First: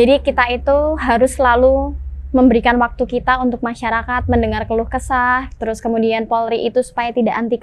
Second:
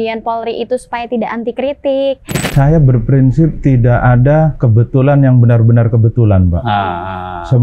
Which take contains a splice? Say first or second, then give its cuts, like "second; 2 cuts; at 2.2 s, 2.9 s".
second; 3 cuts; at 2.5 s, 3.6 s, 4.6 s